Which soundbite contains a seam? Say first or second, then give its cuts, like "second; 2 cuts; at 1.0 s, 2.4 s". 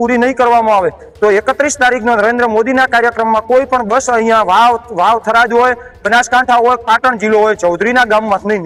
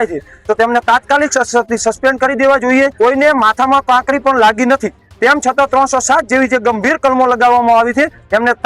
second; 1 cut; at 2.9 s